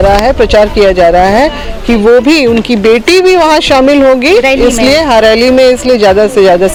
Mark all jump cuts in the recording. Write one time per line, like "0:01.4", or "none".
none